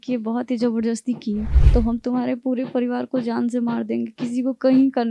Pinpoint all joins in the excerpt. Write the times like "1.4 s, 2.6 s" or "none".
1.5 s